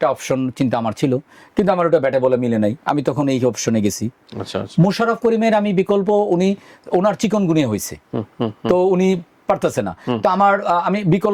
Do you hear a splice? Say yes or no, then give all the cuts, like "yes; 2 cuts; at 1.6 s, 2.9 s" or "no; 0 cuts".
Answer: no; 0 cuts